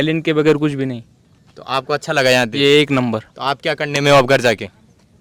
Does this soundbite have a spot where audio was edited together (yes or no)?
no